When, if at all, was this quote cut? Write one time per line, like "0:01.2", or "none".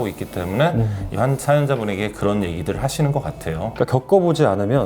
0:03.7